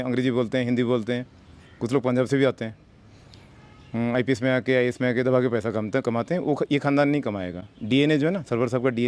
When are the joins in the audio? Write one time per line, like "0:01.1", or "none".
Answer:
none